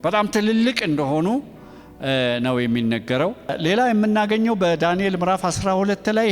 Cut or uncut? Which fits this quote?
cut